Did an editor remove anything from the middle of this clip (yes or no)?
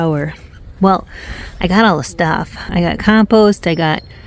yes